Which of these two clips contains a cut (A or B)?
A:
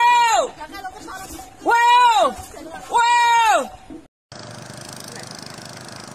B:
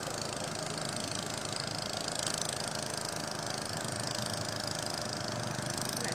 A